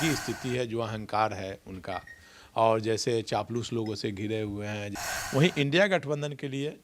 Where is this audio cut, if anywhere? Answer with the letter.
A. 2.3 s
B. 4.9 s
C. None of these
B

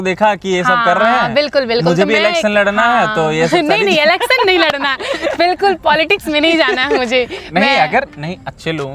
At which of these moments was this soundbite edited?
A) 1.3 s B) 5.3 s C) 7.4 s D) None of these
D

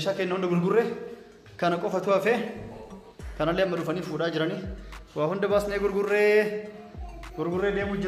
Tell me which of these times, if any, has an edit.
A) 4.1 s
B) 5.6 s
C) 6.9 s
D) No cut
D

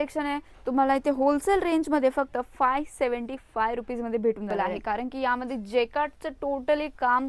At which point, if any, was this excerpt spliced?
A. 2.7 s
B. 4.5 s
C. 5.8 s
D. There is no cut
B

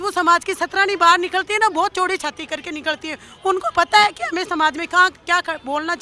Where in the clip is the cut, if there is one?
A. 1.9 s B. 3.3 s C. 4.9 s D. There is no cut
D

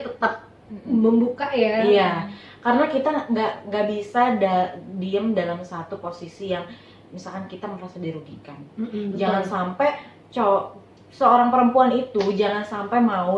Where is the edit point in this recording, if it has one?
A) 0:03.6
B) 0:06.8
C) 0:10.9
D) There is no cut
D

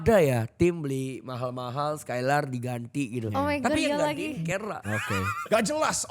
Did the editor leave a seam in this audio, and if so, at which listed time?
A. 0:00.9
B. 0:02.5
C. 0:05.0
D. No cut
C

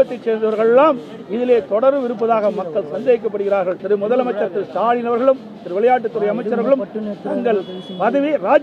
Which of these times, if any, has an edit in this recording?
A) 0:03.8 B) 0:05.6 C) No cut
A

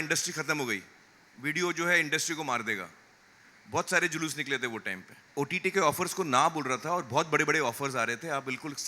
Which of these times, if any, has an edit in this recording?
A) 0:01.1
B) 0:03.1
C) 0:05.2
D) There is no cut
C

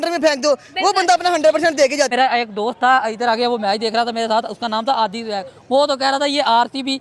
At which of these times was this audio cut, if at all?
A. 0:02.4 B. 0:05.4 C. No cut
C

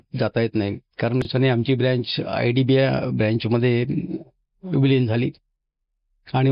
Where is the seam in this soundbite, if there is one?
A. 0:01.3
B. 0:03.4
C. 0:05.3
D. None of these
A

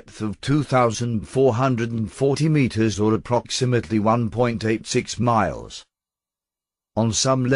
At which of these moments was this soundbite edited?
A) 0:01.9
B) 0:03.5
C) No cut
C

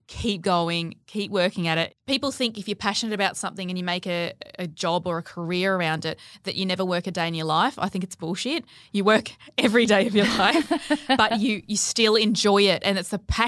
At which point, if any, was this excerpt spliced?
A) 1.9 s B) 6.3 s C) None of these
A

